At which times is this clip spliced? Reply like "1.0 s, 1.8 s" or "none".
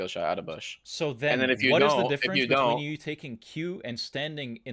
none